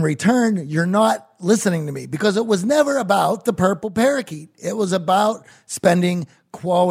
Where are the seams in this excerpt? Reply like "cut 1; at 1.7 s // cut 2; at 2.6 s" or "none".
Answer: none